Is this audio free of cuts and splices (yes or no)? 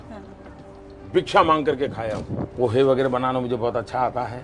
no